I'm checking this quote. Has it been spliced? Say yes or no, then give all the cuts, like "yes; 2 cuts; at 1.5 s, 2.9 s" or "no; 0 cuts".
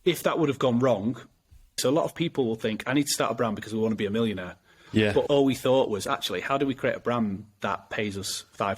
yes; 1 cut; at 1.8 s